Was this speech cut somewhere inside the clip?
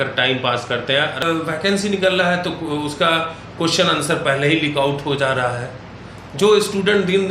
yes; 1 cut; at 1.2 s

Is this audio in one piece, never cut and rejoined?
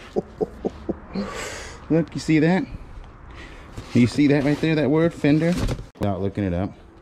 no; 1 cut; at 6.0 s

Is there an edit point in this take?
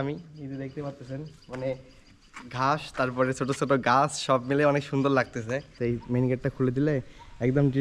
yes; 1 cut; at 5.7 s

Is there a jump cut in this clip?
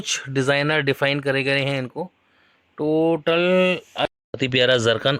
yes; 1 cut; at 4.0 s

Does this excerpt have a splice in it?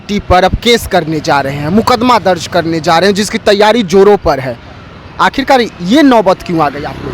no; 0 cuts

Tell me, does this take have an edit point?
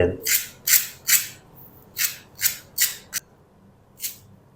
yes; 1 cut; at 3.2 s

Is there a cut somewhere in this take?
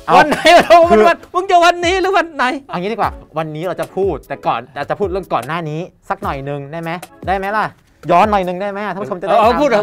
no; 0 cuts

